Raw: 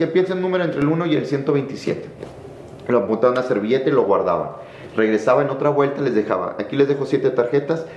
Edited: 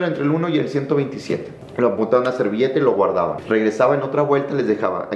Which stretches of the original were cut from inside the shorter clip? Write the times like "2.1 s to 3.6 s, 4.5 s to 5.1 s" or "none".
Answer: 2.1 s to 2.7 s, 4.5 s to 4.8 s